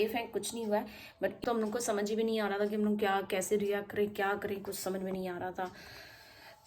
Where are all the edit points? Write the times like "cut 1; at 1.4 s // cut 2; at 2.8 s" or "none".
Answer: cut 1; at 1.4 s